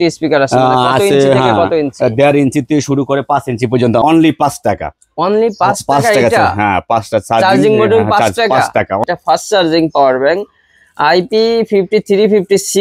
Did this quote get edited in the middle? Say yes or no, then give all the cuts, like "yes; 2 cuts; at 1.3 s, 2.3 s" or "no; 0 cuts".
yes; 2 cuts; at 4.0 s, 9.0 s